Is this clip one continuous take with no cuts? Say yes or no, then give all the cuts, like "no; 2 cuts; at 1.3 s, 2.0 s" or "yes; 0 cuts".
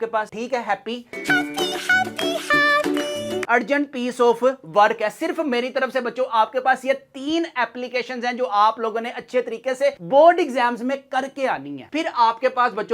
no; 2 cuts; at 3.4 s, 11.8 s